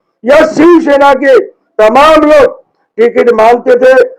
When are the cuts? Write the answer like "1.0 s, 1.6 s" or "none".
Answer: none